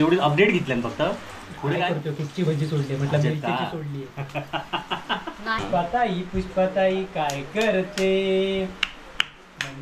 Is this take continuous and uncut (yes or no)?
no